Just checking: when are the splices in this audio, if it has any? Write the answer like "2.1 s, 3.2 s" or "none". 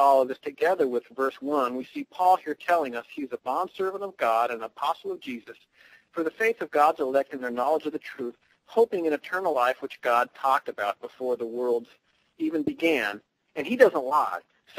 7.0 s